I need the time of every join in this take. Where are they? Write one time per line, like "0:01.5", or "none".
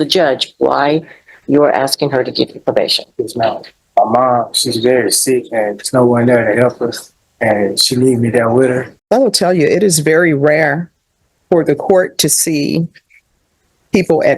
0:03.7
0:08.9